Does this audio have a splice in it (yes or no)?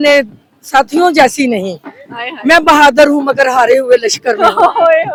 no